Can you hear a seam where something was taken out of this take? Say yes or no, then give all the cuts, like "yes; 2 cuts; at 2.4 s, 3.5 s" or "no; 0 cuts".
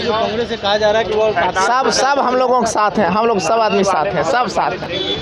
no; 0 cuts